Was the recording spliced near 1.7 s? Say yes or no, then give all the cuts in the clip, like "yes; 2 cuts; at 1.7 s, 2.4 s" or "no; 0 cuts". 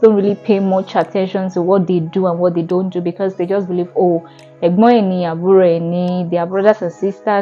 no; 0 cuts